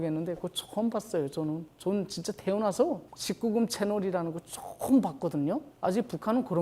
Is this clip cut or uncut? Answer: uncut